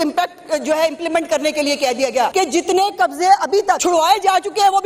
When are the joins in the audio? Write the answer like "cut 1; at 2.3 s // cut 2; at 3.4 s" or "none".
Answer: cut 1; at 2.3 s // cut 2; at 3.8 s